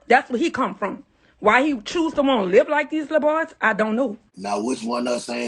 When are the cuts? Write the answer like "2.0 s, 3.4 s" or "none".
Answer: 4.3 s